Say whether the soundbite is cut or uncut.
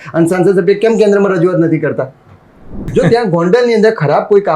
cut